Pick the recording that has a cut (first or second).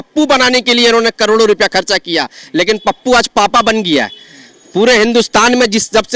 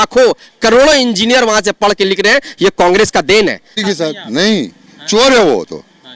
second